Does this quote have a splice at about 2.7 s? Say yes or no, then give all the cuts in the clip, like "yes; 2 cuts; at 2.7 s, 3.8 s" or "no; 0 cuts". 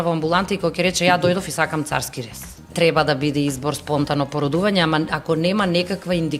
yes; 1 cut; at 2.7 s